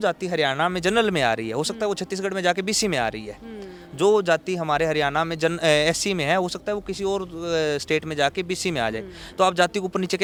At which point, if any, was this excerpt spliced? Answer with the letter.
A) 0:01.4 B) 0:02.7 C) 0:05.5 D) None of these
D